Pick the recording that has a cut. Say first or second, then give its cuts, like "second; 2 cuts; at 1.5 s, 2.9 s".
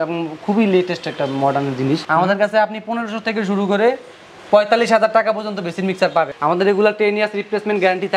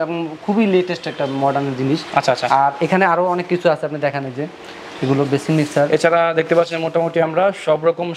first; 2 cuts; at 2.0 s, 6.3 s